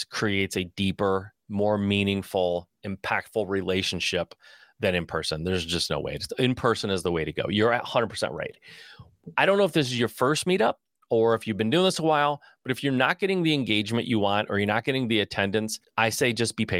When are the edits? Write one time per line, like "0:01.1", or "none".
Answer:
0:15.8